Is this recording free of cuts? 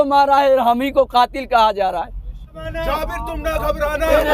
no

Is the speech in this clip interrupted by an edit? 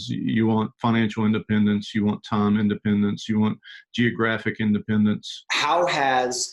yes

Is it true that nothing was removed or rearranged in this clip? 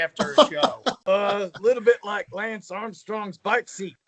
no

